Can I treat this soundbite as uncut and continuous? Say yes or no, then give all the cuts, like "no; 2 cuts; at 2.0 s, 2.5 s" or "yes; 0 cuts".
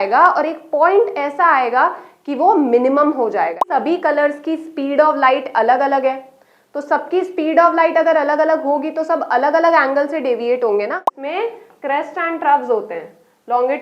no; 2 cuts; at 3.6 s, 11.2 s